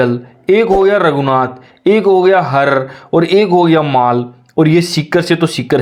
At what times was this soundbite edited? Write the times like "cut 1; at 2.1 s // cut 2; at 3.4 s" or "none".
none